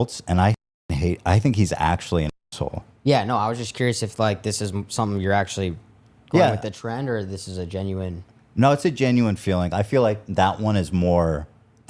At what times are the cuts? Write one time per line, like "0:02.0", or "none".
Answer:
0:02.9